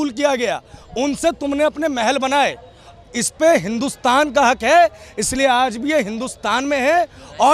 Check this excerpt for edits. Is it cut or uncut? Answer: uncut